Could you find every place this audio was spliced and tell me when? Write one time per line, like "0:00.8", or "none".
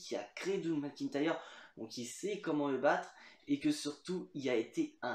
none